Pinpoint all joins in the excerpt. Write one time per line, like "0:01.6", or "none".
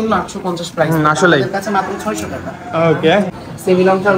0:03.3